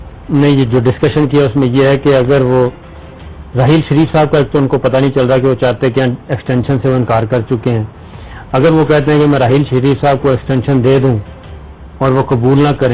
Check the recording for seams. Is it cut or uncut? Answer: uncut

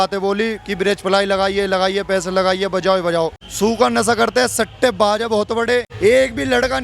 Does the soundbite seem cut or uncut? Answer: cut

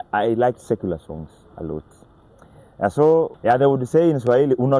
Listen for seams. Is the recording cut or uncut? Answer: cut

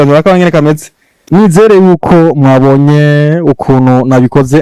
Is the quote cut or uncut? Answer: cut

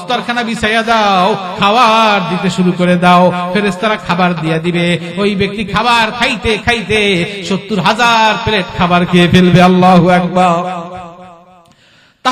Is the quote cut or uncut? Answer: uncut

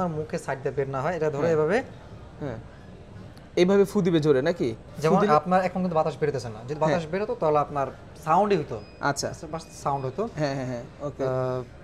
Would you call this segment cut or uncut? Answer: uncut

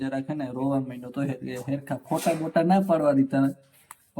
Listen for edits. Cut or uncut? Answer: uncut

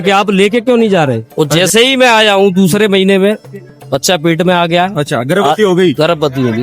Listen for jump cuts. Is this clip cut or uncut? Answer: cut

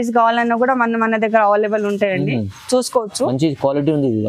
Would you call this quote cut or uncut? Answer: uncut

